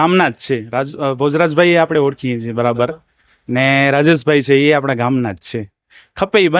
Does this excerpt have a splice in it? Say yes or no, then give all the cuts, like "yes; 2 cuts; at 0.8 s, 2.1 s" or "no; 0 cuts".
no; 0 cuts